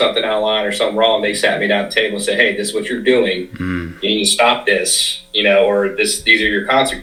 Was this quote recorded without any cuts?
yes; 0 cuts

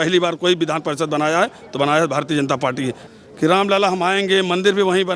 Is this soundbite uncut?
no; 1 cut; at 2.9 s

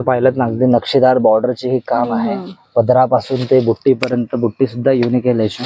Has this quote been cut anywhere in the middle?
no; 0 cuts

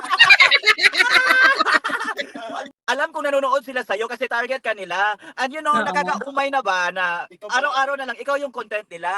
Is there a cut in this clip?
yes; 1 cut; at 2.7 s

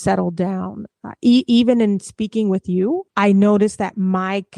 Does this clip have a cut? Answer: yes; 1 cut; at 3.1 s

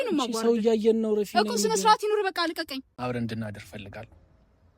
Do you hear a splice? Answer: yes; 1 cut; at 2.8 s

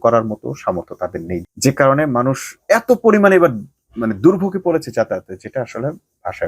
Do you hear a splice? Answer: yes; 1 cut; at 1.4 s

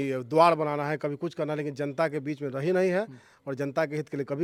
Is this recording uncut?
yes; 0 cuts

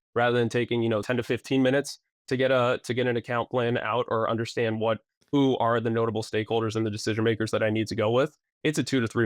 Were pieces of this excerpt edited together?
yes; 1 cut; at 1.0 s

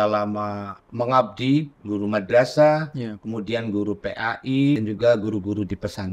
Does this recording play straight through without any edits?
no; 2 cuts; at 1.7 s, 4.8 s

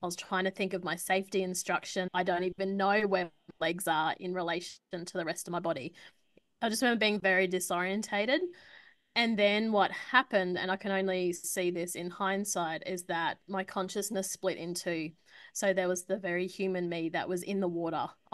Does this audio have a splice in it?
yes; 1 cut; at 2.1 s

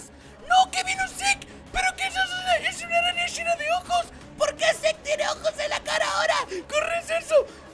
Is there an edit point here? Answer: no; 0 cuts

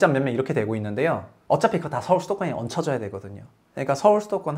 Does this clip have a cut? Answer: yes; 1 cut; at 1.3 s

